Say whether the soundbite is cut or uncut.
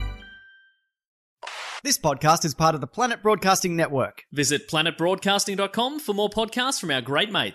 cut